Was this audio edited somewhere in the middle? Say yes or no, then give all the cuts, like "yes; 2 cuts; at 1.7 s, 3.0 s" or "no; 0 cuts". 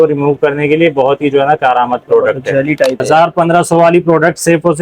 yes; 1 cut; at 3.0 s